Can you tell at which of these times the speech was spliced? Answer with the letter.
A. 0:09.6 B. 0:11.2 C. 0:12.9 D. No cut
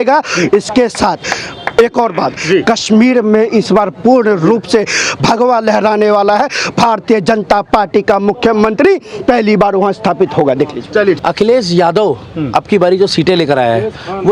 B